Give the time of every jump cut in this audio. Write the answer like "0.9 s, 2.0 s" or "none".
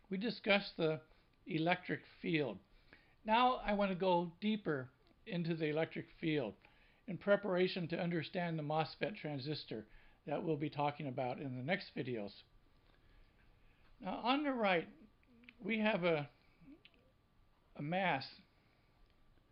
none